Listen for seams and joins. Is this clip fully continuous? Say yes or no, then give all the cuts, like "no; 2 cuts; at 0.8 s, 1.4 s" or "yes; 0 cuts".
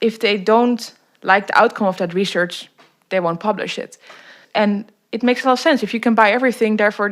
no; 1 cut; at 4.4 s